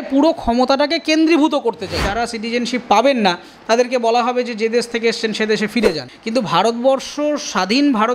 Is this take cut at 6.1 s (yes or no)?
yes